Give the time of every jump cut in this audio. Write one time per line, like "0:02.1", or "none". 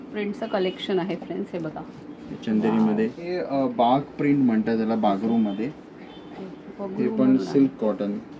0:03.4